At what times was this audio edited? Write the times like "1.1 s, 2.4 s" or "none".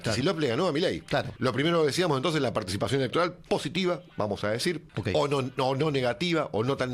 1.3 s, 4.9 s